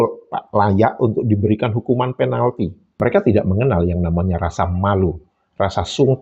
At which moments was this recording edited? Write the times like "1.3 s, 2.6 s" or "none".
2.8 s